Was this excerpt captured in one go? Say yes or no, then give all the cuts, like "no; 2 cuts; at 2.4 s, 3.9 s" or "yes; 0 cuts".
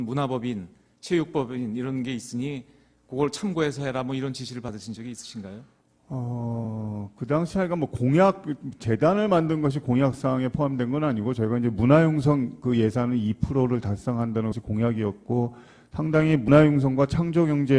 no; 1 cut; at 9.1 s